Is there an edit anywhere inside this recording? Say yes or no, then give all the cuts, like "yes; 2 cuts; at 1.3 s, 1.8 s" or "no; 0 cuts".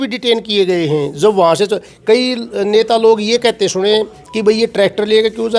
no; 0 cuts